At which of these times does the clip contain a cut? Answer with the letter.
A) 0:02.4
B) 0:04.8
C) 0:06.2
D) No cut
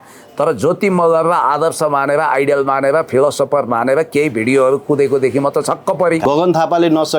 C